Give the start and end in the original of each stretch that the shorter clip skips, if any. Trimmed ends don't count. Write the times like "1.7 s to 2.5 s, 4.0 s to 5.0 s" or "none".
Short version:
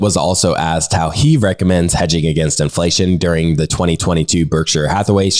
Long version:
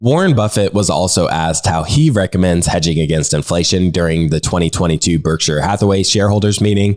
none